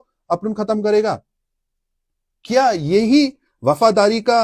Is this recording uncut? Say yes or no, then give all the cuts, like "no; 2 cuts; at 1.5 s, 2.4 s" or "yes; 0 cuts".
yes; 0 cuts